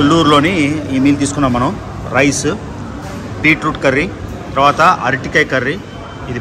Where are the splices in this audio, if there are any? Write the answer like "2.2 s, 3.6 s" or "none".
none